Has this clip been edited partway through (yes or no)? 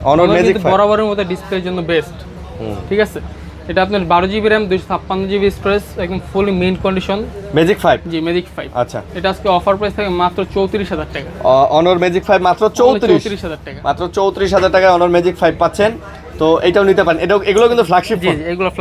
no